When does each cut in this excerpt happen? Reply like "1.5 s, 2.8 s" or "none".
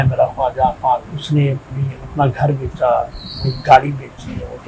1.1 s